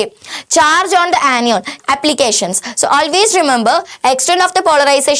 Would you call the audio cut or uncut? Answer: cut